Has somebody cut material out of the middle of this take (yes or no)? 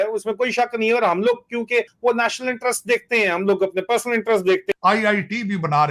yes